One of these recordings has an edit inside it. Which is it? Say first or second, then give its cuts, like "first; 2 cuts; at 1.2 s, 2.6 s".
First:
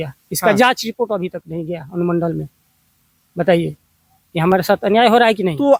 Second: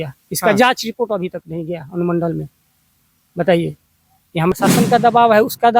second; 1 cut; at 4.5 s